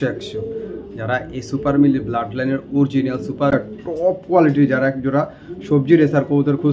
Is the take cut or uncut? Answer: cut